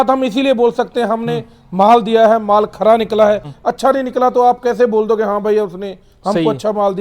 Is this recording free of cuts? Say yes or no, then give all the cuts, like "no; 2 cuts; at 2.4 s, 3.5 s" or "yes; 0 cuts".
no; 1 cut; at 3.5 s